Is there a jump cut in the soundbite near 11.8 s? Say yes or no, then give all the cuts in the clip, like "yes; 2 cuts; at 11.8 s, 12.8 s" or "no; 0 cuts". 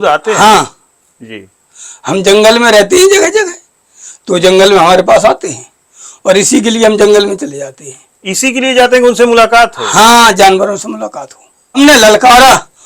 yes; 1 cut; at 11.8 s